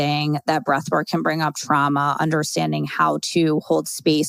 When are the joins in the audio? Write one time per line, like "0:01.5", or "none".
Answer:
none